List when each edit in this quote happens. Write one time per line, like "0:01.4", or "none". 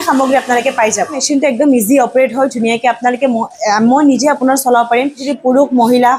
0:01.2
0:05.3

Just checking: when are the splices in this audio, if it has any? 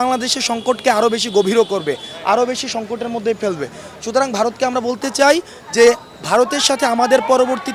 none

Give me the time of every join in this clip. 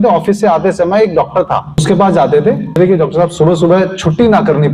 0:01.8
0:02.8

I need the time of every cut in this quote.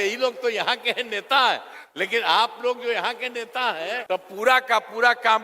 0:04.0

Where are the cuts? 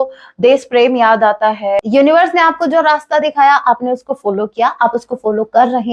0:01.8

